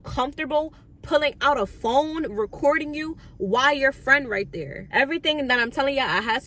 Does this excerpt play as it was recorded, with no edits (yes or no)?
no